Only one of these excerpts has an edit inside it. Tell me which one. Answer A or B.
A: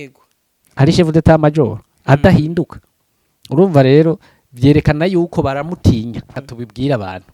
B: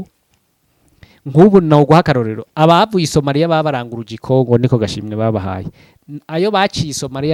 A